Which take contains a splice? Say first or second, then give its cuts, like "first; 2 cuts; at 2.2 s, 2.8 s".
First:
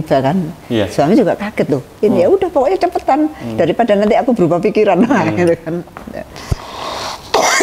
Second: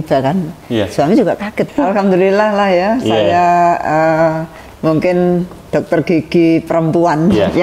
second; 1 cut; at 1.7 s